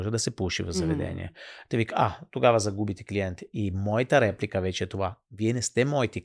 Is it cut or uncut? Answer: uncut